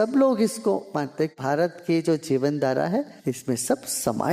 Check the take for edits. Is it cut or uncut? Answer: cut